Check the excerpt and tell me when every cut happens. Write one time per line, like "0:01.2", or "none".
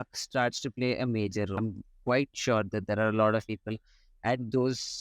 0:01.6